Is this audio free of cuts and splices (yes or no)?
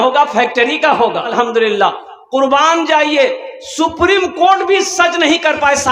no